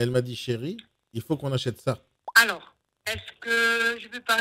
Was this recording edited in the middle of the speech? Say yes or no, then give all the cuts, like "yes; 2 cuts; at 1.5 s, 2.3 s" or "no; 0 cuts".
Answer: yes; 1 cut; at 2.1 s